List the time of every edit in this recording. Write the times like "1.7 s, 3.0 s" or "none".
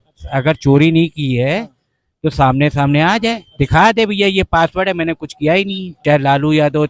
5.9 s